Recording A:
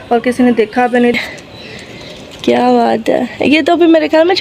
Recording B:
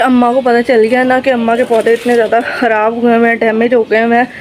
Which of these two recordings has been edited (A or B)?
A